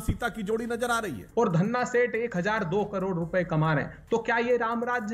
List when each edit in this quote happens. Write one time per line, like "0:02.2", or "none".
0:01.3